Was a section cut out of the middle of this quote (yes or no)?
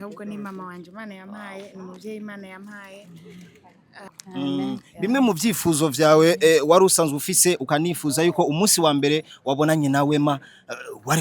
yes